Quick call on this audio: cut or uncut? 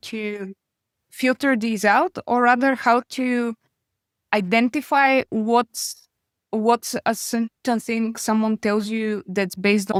uncut